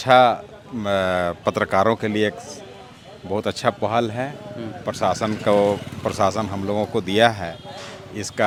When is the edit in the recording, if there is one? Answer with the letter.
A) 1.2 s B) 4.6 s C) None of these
C